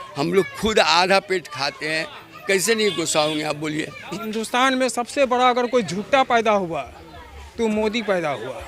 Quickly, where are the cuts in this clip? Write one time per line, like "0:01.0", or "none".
0:04.2